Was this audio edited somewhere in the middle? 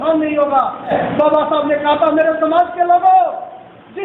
yes; 1 cut; at 0.9 s

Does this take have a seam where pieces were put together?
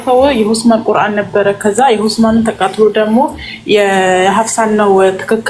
no; 0 cuts

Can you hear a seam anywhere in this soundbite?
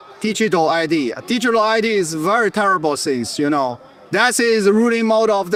no; 0 cuts

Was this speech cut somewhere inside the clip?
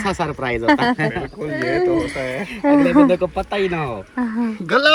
no; 0 cuts

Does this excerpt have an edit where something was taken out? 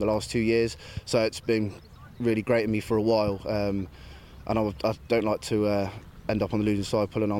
no; 0 cuts

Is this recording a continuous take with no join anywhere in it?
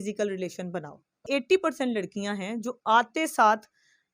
no; 1 cut; at 1.2 s

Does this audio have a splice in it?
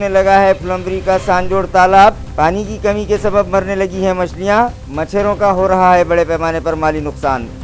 no; 0 cuts

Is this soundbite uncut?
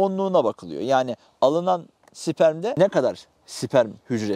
no; 1 cut; at 2.7 s

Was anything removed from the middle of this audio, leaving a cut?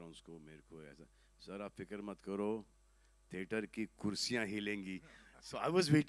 no; 0 cuts

